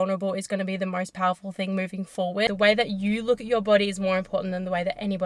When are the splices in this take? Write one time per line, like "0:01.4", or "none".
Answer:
0:02.5